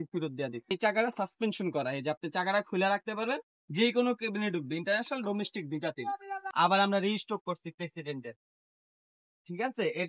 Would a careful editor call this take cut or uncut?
cut